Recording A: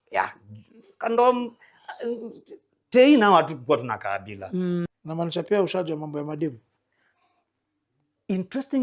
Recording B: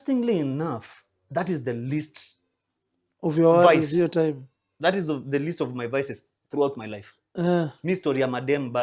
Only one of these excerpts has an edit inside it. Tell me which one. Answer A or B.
A